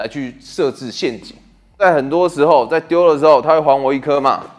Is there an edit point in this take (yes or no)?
no